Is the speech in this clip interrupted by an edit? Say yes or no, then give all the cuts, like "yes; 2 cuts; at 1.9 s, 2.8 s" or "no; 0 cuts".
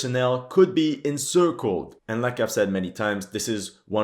yes; 1 cut; at 1.9 s